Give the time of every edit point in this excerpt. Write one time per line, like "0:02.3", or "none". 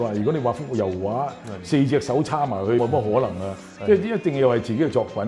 0:02.8